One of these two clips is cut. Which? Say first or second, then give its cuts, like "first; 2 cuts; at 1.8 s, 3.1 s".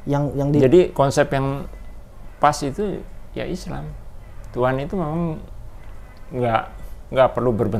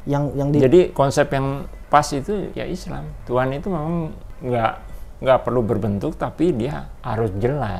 second; 4 cuts; at 1.7 s, 2.7 s, 4.3 s, 6.9 s